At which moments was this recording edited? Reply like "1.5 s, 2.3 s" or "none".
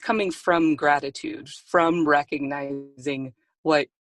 none